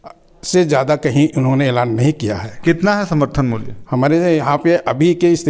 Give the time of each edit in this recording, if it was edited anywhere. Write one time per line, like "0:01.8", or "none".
none